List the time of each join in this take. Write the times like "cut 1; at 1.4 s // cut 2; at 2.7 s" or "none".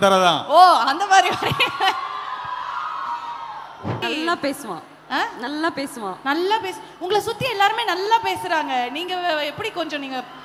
none

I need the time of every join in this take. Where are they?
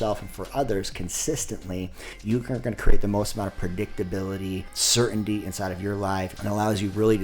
cut 1; at 2.0 s // cut 2; at 4.8 s // cut 3; at 6.3 s

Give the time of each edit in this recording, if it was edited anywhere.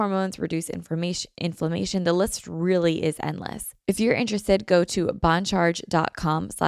cut 1; at 3.7 s

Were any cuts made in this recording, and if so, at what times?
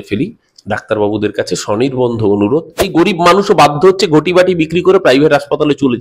cut 1; at 2.9 s

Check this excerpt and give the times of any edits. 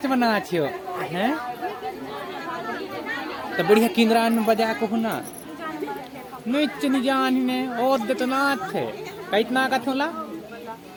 none

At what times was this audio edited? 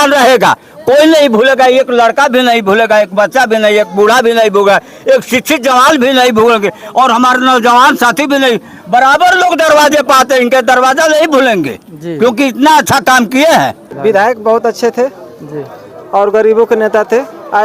cut 1; at 13.9 s

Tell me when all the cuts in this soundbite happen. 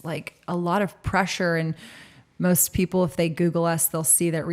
none

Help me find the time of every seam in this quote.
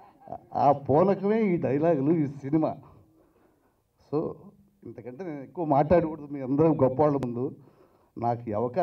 none

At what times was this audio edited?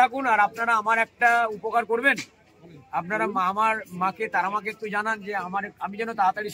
none

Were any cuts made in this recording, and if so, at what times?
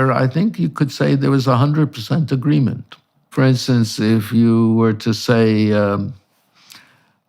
cut 1; at 3.3 s

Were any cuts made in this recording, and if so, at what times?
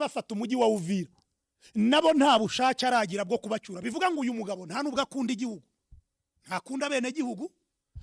none

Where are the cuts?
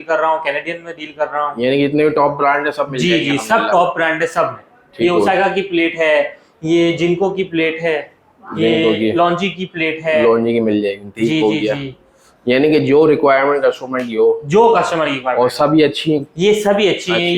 none

